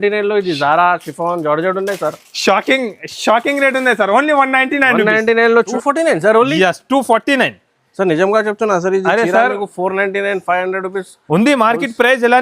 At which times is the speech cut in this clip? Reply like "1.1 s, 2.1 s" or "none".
5.7 s